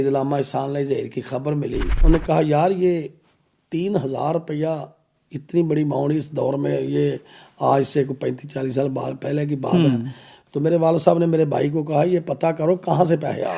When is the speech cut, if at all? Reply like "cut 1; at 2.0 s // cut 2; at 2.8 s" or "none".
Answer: cut 1; at 1.9 s